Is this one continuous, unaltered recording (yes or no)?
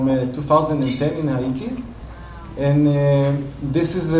yes